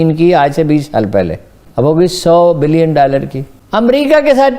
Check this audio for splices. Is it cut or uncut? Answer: cut